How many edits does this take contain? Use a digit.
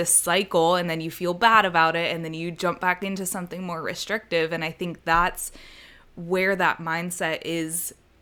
0